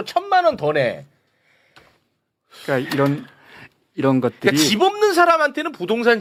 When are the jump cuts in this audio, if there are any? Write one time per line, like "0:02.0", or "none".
none